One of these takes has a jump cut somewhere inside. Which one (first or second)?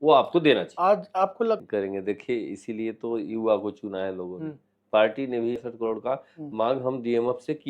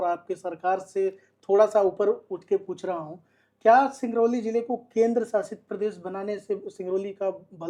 first